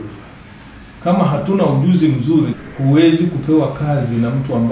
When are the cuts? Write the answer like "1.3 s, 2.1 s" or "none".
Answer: 2.6 s